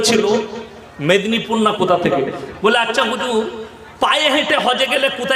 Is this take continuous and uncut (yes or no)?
yes